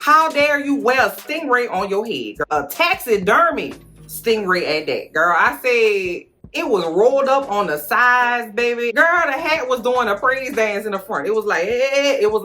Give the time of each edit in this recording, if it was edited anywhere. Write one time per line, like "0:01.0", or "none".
0:08.9